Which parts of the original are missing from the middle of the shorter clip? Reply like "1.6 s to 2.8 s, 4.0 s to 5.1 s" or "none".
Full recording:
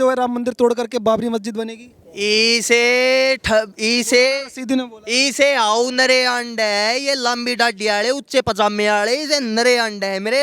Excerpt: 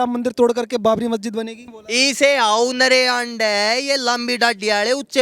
2.0 s to 5.0 s